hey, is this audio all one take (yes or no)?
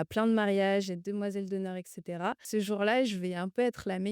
no